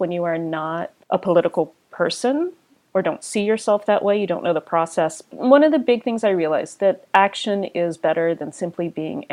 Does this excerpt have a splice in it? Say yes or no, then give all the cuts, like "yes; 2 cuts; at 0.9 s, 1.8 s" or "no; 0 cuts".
yes; 2 cuts; at 0.9 s, 5.3 s